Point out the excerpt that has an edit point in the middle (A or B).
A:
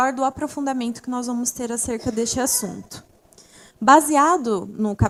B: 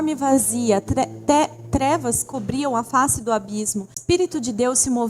B